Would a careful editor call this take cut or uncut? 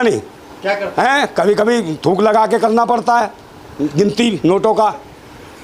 uncut